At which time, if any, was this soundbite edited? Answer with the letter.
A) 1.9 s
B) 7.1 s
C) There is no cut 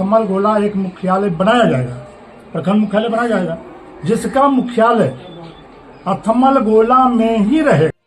C